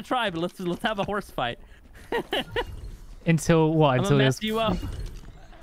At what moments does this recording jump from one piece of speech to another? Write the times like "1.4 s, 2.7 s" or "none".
none